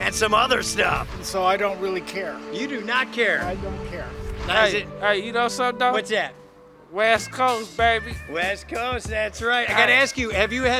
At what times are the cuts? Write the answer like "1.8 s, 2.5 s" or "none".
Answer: 1.1 s, 4.2 s